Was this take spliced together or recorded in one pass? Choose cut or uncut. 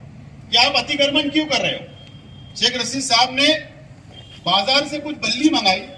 uncut